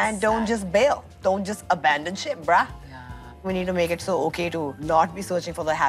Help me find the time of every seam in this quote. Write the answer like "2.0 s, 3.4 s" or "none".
3.4 s